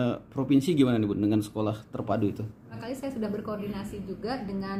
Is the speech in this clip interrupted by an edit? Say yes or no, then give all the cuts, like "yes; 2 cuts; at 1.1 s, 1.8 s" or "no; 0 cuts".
yes; 1 cut; at 2.8 s